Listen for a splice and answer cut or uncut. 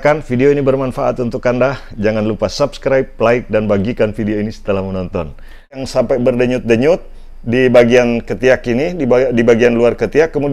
cut